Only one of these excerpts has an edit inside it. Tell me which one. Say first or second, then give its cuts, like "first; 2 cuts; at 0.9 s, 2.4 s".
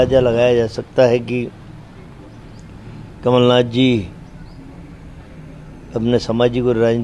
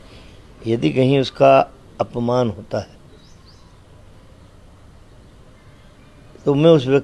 first; 1 cut; at 1.5 s